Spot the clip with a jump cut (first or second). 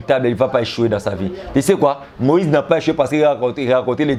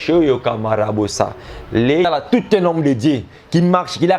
second